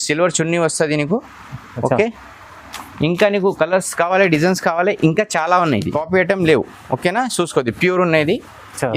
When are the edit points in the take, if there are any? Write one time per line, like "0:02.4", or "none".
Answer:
0:06.0